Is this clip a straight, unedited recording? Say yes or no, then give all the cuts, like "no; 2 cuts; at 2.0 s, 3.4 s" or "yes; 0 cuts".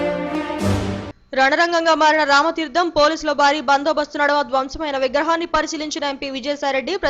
yes; 0 cuts